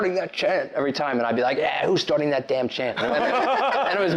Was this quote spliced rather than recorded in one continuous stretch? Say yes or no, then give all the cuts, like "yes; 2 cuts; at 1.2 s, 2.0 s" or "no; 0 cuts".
no; 0 cuts